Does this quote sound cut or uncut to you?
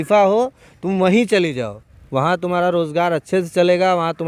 uncut